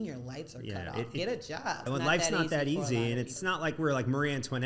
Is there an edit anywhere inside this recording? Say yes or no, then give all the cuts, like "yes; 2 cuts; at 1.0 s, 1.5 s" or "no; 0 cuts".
yes; 2 cuts; at 1.9 s, 3.4 s